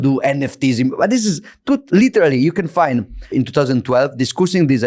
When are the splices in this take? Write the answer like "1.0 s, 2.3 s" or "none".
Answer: 3.3 s

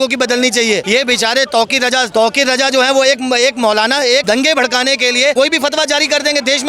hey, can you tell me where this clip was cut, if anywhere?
0.8 s, 2.1 s, 4.2 s, 5.3 s

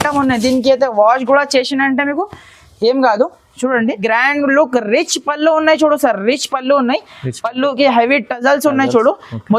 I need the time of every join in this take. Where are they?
4.0 s

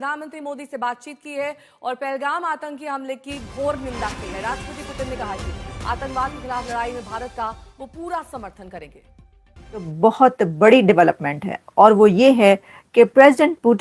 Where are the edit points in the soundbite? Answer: 9.9 s

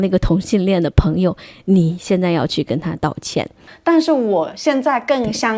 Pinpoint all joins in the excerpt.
3.7 s

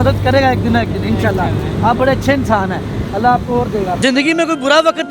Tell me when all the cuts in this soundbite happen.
4.0 s

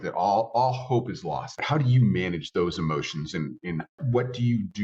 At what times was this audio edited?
1.6 s, 4.0 s

